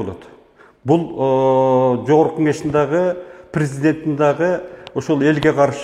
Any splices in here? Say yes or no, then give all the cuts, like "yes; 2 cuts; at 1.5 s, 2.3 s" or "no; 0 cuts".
no; 0 cuts